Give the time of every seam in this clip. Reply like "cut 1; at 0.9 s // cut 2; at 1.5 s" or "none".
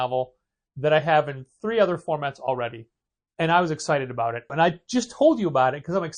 cut 1; at 4.5 s